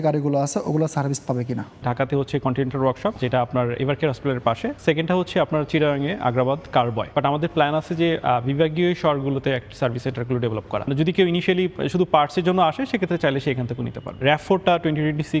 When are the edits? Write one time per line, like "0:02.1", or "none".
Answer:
0:01.8
0:03.2
0:04.7
0:07.1
0:10.9
0:14.2